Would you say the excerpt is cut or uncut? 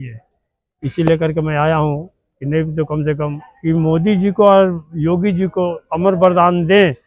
cut